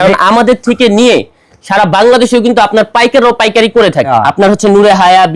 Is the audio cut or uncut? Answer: cut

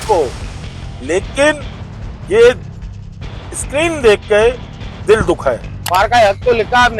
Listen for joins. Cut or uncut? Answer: cut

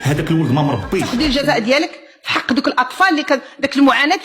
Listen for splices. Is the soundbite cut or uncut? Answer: cut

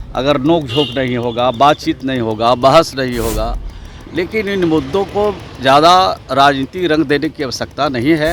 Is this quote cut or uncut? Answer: uncut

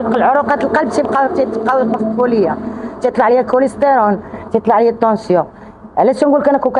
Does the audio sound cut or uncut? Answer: uncut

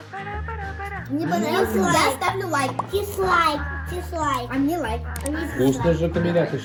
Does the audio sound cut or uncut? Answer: uncut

